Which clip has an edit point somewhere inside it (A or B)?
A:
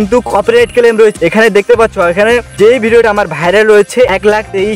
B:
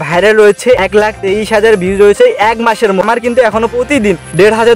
B